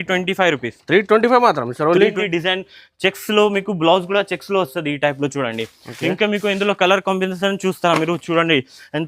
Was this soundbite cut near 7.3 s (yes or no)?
no